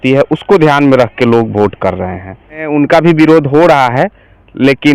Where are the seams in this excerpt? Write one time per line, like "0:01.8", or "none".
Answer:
0:02.7